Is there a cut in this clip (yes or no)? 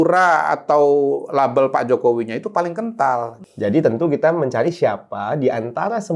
yes